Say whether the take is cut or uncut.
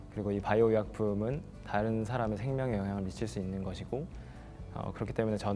uncut